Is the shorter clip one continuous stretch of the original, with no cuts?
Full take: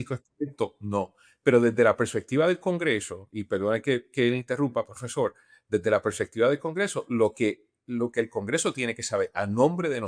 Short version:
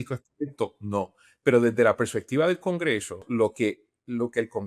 no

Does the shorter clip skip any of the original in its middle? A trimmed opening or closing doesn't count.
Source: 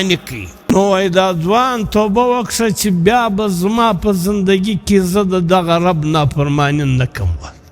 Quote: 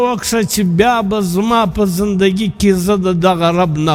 no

